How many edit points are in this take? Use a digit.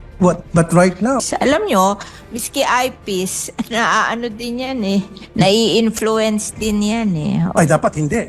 1